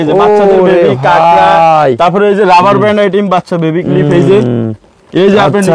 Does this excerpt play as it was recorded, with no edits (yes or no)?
yes